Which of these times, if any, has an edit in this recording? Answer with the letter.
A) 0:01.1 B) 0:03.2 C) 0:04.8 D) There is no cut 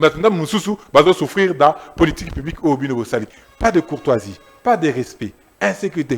B